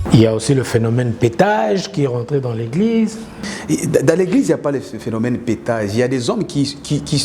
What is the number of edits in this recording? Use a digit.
1